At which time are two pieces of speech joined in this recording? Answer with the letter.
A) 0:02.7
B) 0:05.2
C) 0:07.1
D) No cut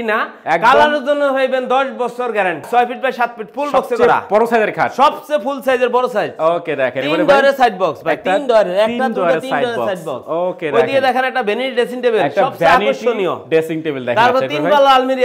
A